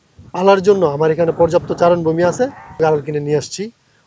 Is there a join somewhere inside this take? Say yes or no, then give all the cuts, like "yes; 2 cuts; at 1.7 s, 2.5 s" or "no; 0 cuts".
yes; 1 cut; at 2.8 s